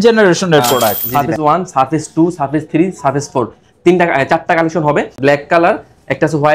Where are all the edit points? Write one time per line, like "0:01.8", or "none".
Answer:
0:00.9
0:05.1